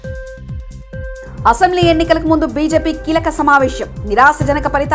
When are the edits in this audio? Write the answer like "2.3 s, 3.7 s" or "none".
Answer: 1.2 s